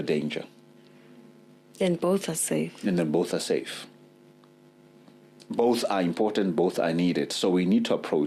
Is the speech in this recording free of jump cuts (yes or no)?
yes